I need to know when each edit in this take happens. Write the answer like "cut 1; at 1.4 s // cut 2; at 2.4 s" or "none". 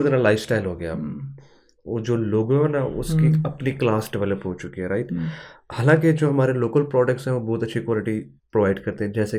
none